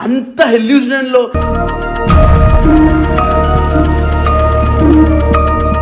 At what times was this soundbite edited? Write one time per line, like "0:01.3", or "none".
none